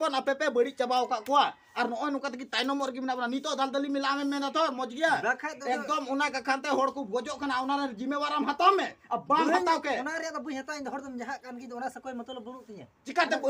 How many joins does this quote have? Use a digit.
0